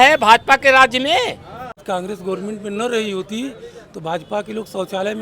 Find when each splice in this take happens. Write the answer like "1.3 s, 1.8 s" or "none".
1.8 s